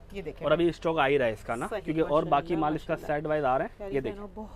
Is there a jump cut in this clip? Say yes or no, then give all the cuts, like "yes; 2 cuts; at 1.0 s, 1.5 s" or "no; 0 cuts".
no; 0 cuts